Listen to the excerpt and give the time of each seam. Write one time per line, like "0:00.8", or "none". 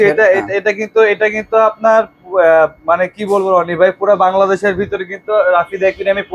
none